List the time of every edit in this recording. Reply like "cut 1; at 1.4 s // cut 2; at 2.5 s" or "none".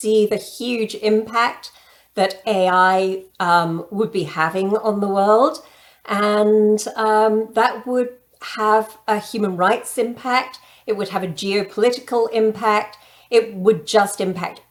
none